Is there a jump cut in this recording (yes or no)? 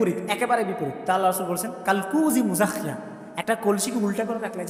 no